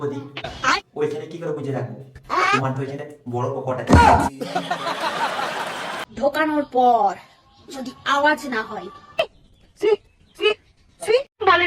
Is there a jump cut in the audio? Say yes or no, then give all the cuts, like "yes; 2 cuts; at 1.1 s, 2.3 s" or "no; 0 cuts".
yes; 1 cut; at 6.1 s